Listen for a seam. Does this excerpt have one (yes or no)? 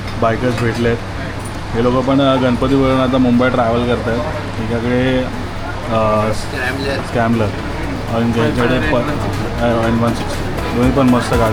no